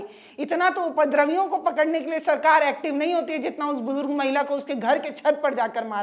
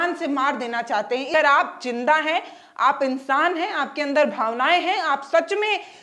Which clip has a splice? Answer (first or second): second